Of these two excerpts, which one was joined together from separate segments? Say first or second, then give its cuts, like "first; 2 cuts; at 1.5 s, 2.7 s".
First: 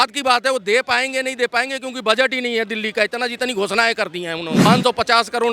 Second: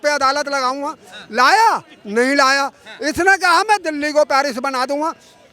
first; 1 cut; at 4.6 s